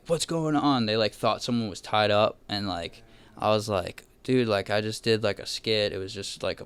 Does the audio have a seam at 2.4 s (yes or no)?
no